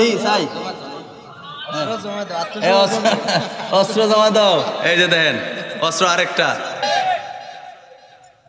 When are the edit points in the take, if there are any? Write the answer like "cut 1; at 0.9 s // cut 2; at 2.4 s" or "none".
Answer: cut 1; at 6.8 s